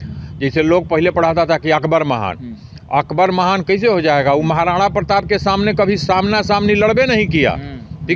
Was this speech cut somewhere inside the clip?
no; 0 cuts

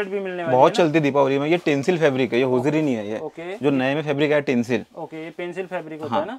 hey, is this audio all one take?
yes; 0 cuts

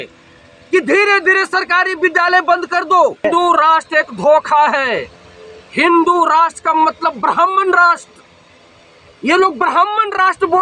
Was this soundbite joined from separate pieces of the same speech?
yes; 1 cut; at 3.2 s

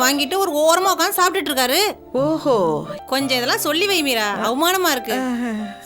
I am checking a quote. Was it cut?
yes; 1 cut; at 2.9 s

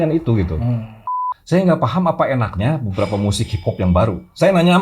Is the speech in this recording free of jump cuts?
no; 1 cut; at 1.1 s

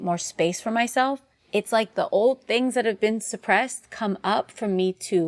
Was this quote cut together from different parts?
yes; 1 cut; at 1.3 s

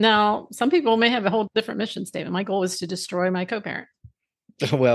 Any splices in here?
yes; 1 cut; at 1.5 s

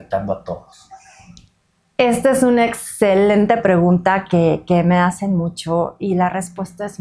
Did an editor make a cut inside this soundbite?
no; 0 cuts

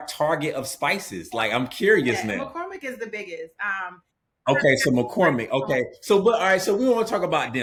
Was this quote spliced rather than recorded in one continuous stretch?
no; 0 cuts

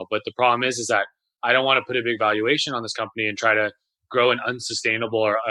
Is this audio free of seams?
yes; 0 cuts

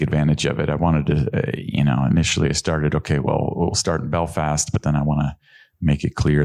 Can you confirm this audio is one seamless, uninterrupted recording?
yes; 0 cuts

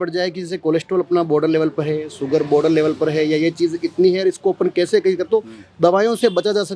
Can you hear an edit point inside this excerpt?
no; 0 cuts

